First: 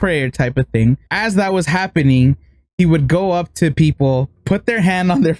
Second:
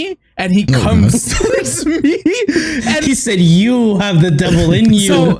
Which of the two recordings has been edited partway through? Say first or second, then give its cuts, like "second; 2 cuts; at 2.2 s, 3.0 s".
first; 1 cut; at 1.1 s